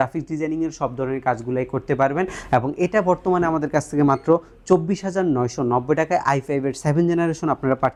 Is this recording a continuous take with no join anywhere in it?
yes; 0 cuts

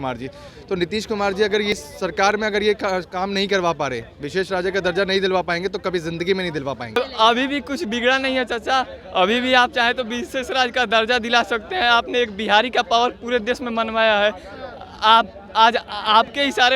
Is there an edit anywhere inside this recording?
yes; 2 cuts; at 1.7 s, 7.0 s

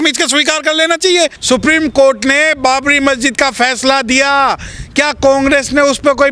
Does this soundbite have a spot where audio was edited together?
yes; 1 cut; at 1.4 s

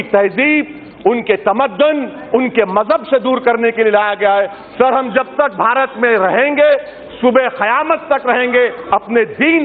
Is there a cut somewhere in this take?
no; 0 cuts

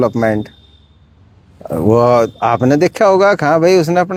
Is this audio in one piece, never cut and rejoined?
yes; 0 cuts

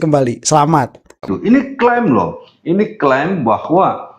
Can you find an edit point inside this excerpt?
yes; 1 cut; at 1.3 s

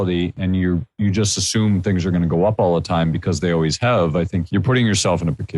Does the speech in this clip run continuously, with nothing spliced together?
no; 1 cut; at 4.4 s

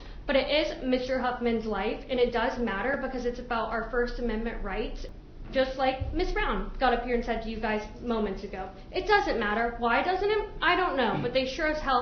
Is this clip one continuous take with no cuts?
no; 1 cut; at 5.0 s

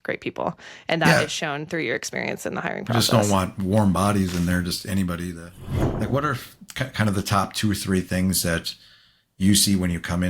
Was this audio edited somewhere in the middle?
yes; 1 cut; at 5.5 s

